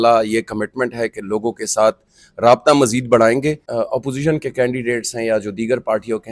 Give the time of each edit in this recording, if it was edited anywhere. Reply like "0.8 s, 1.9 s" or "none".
3.6 s